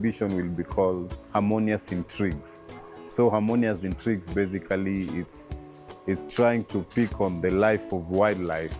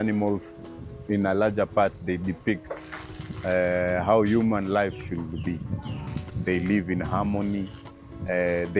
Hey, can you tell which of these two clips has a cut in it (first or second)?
first